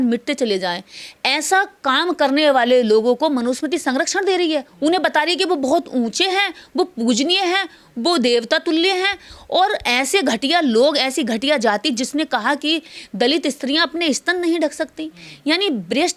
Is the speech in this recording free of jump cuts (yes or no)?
yes